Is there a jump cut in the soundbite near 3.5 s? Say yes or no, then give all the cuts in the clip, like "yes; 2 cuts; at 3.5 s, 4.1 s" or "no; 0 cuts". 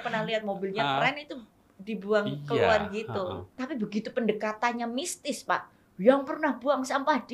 yes; 1 cut; at 3.5 s